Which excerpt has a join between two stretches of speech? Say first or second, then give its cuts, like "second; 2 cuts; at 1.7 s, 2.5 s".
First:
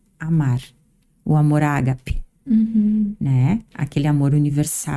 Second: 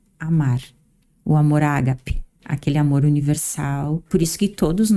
second; 2 cuts; at 2.4 s, 4.0 s